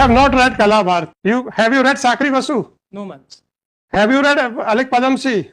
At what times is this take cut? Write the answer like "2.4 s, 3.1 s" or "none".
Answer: 1.1 s